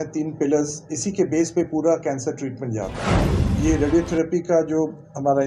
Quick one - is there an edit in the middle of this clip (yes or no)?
yes